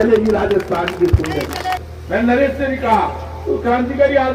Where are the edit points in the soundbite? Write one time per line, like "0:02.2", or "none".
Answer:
0:01.9

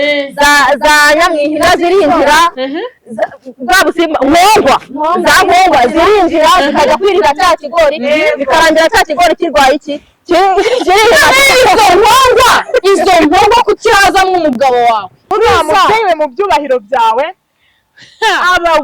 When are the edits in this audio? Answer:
0:15.2

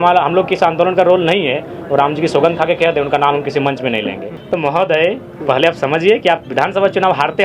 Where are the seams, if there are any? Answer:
0:04.3

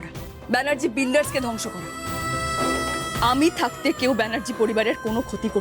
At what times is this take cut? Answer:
0:03.1

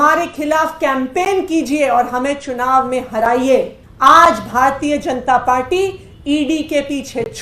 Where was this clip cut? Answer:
0:03.8

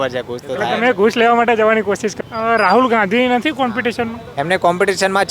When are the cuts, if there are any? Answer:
0:02.1

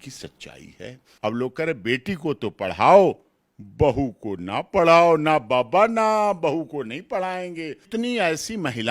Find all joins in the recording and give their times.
0:01.0
0:07.8

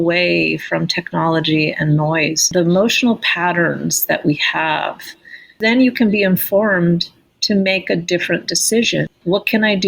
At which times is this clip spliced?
0:02.5
0:05.6
0:09.1

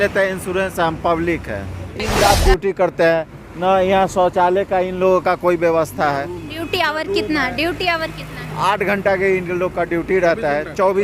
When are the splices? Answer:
0:02.0

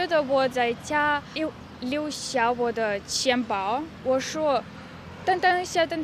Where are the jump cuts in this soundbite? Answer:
0:01.4
0:03.9

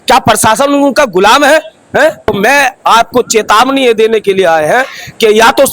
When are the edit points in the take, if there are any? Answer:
0:02.3

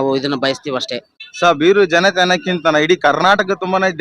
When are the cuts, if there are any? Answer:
0:01.2

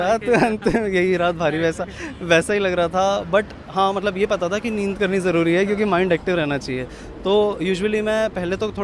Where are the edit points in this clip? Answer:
none

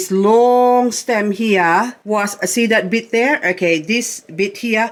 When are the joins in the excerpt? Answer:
none

